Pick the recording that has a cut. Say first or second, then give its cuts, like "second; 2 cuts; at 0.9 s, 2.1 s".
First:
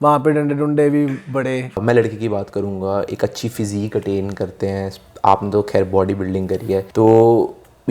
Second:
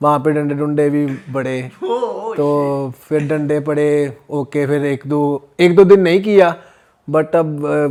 first; 2 cuts; at 1.8 s, 6.9 s